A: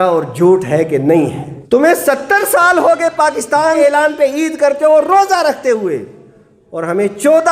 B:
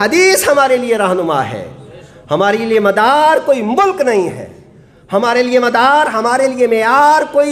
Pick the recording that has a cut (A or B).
A